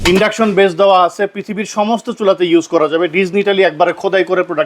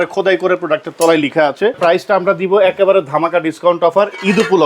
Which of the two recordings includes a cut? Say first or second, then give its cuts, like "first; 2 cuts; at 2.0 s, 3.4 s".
second; 1 cut; at 1.8 s